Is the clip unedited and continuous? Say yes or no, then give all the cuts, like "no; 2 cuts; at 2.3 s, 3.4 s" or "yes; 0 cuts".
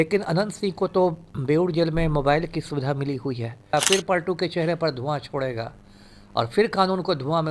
no; 1 cut; at 3.7 s